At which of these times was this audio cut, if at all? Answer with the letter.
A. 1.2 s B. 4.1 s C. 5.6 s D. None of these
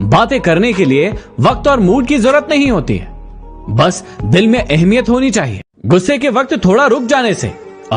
C